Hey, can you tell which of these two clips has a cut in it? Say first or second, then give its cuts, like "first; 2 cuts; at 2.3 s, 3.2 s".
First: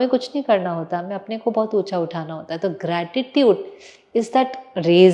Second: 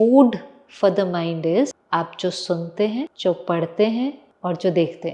second; 3 cuts; at 1.8 s, 3.1 s, 4.3 s